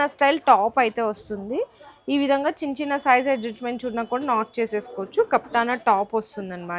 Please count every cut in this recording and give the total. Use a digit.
0